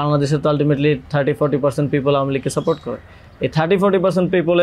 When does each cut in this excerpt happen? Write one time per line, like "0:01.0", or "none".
none